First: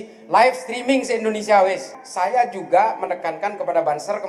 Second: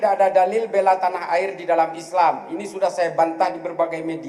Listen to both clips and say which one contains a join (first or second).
first